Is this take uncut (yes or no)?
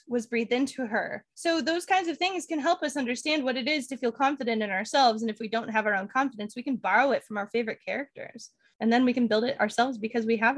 no